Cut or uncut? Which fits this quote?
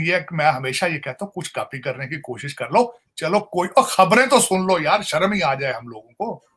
uncut